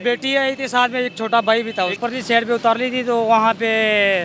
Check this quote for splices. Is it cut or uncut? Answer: cut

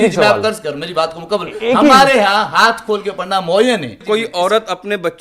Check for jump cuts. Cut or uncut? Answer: cut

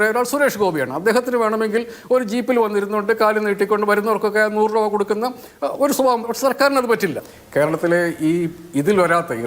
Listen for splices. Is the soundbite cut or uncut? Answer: cut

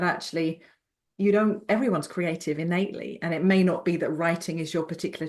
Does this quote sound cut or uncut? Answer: uncut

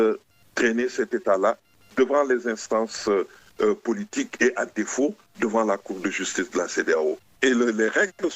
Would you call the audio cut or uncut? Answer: cut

